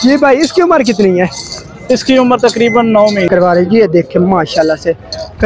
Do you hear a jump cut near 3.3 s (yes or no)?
yes